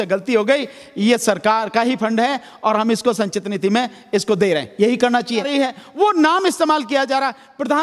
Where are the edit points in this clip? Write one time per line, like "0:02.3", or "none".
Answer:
0:05.4